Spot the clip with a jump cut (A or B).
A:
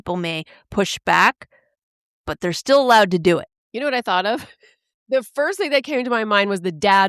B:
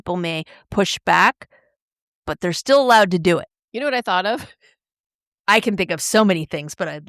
A